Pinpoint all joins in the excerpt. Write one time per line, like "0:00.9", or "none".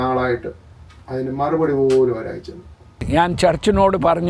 0:03.0